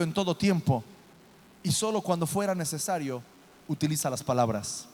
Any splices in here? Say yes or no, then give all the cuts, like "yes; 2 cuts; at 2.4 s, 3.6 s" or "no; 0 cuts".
no; 0 cuts